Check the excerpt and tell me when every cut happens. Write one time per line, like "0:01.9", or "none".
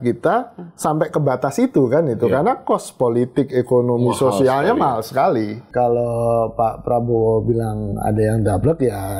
0:05.7